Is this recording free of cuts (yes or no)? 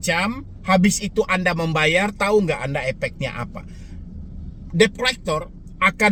yes